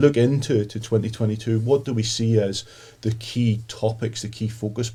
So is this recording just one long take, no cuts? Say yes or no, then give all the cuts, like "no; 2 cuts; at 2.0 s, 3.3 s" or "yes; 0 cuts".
yes; 0 cuts